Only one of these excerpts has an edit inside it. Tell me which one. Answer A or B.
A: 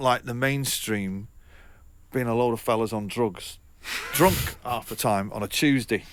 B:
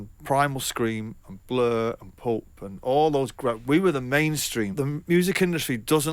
B